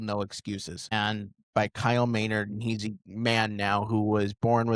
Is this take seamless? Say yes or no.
no